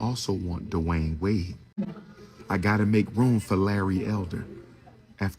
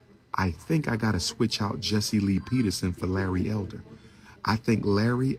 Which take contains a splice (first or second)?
first